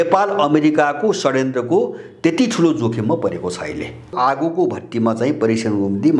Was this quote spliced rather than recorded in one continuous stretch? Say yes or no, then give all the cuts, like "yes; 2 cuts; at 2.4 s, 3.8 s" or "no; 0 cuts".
yes; 1 cut; at 4.1 s